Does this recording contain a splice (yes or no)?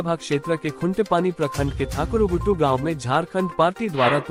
no